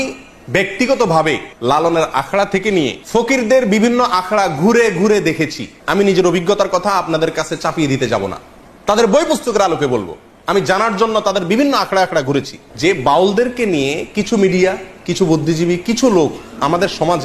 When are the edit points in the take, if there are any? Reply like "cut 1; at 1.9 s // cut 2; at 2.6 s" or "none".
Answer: cut 1; at 12.6 s